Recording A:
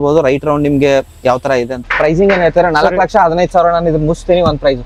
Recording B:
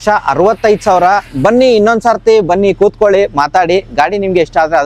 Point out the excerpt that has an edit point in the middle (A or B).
A